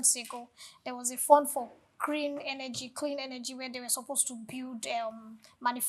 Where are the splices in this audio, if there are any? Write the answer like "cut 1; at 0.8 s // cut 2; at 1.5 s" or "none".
none